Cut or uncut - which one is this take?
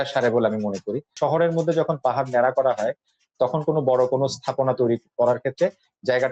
cut